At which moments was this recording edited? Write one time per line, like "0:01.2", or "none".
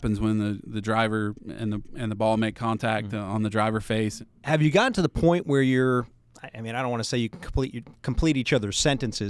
0:04.2